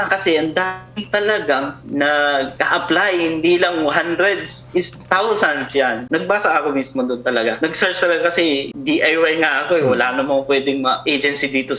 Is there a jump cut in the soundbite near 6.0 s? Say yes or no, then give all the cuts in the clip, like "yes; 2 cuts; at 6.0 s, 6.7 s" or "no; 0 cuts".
yes; 1 cut; at 6.0 s